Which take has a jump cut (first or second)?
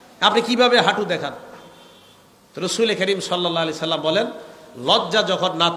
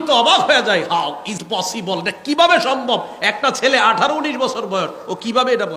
second